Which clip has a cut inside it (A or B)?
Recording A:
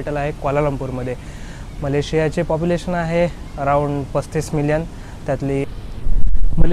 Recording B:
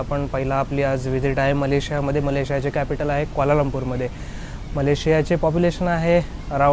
A